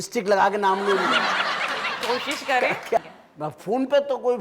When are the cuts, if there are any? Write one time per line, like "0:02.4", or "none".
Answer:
0:03.0